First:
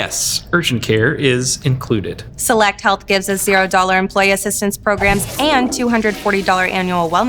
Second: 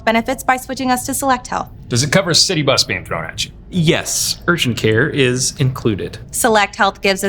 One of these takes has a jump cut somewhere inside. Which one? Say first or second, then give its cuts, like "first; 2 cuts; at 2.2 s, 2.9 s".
second; 1 cut; at 1.7 s